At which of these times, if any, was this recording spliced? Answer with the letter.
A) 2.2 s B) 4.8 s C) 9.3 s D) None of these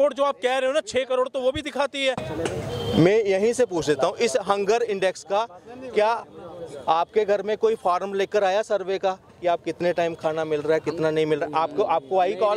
A